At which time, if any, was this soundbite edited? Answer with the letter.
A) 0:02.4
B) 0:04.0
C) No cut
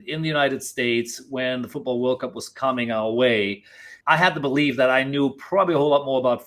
B